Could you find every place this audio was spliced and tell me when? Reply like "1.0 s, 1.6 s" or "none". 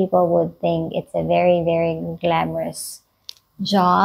none